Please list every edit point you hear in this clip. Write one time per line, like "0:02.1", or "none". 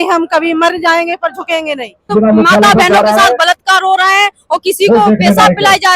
0:02.1